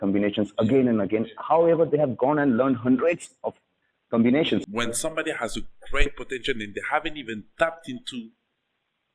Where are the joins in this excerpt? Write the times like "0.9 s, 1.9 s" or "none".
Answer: 4.6 s